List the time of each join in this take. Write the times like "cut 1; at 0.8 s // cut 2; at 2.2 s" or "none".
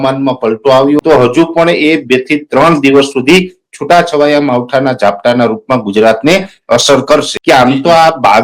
cut 1; at 1.0 s // cut 2; at 7.3 s